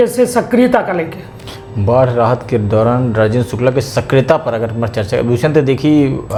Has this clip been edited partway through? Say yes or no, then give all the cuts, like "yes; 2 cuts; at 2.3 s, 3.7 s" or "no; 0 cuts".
no; 0 cuts